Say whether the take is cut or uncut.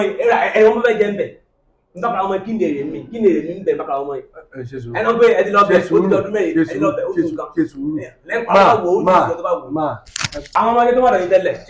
cut